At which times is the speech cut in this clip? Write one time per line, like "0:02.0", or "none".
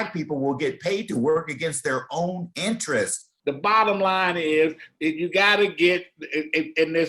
0:03.3

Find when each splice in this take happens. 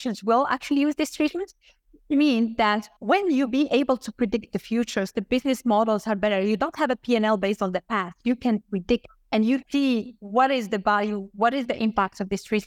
0:09.5

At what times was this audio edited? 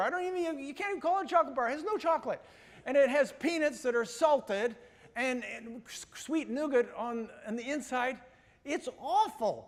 none

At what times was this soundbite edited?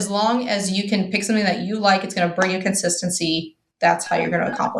none

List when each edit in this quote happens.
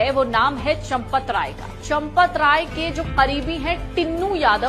none

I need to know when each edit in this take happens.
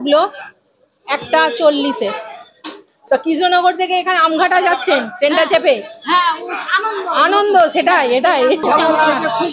0:02.9
0:08.6

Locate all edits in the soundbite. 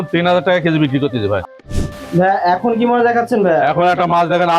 0:01.5

